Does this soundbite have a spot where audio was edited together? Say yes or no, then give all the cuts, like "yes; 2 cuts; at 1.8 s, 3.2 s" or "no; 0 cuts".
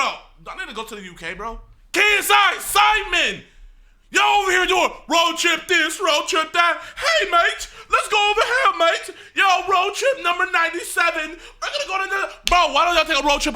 yes; 1 cut; at 1.7 s